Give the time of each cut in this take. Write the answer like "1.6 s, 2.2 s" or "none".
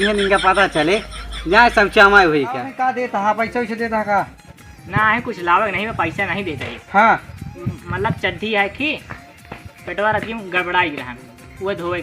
3.0 s